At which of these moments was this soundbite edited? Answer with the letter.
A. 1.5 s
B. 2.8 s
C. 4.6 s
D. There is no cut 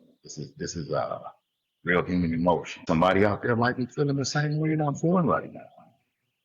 B